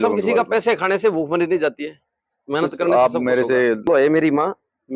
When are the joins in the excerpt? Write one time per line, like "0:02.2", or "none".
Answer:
0:03.9

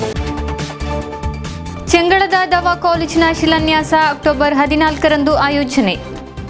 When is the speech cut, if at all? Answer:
0:01.3

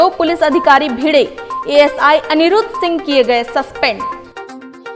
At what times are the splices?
none

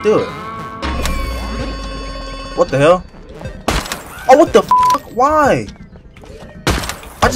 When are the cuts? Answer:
0:02.5

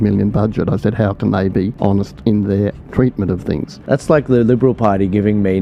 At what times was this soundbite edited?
0:02.1
0:03.8

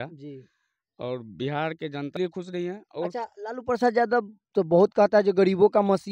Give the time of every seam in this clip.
0:02.2

